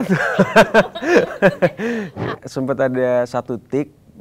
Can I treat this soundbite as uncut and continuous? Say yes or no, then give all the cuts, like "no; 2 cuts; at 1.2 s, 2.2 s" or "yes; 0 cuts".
no; 1 cut; at 2.4 s